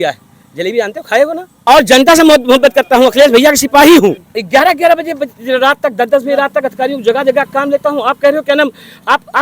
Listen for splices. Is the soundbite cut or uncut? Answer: cut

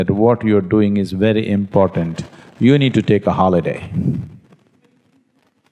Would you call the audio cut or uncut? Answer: uncut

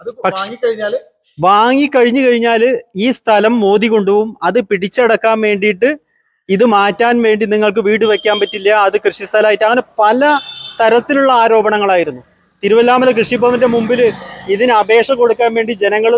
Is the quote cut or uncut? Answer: uncut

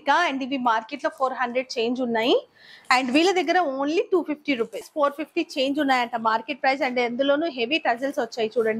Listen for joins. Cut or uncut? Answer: cut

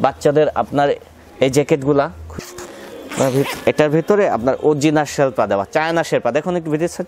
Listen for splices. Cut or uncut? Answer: cut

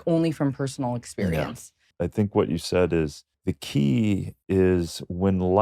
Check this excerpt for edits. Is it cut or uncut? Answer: cut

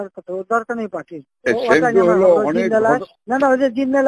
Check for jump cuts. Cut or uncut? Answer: cut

